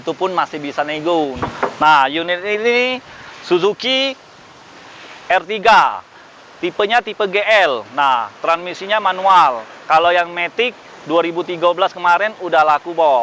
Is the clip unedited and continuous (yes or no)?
no